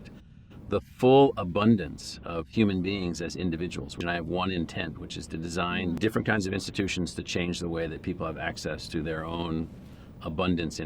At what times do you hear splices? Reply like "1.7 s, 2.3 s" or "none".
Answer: 4.0 s, 6.0 s